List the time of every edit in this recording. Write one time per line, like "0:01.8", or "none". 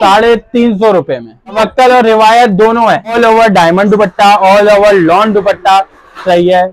0:01.5
0:03.1